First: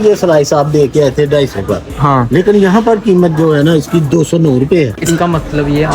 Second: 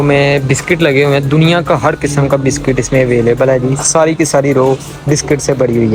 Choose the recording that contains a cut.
first; 1 cut; at 5.0 s

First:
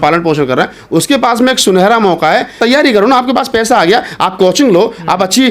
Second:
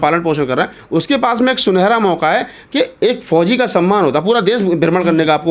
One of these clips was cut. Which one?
first; 1 cut; at 2.6 s

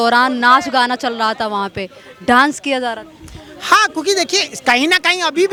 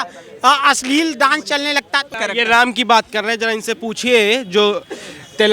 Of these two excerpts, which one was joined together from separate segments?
second; 1 cut; at 2.2 s

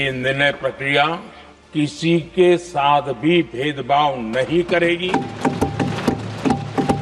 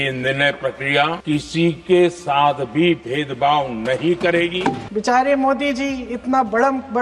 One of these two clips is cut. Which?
second; 2 cuts; at 1.2 s, 4.8 s

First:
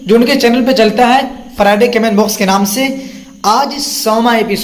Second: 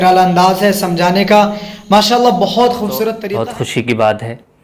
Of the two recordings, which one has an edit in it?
second; 1 cut; at 3.2 s

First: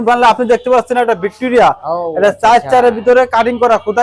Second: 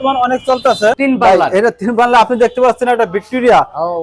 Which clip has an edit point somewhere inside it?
second; 1 cut; at 1.0 s

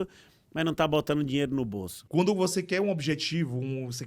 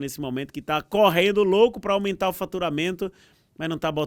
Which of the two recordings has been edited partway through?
first; 1 cut; at 2.0 s

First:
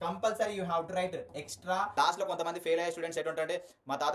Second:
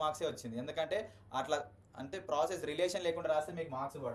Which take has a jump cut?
first; 1 cut; at 1.9 s

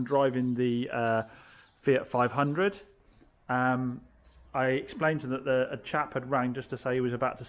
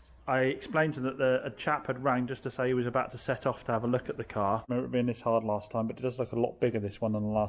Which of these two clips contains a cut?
second; 1 cut; at 4.7 s

